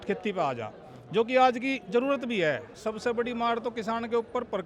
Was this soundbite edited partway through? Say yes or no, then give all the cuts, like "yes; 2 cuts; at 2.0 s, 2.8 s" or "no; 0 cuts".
yes; 1 cut; at 2.7 s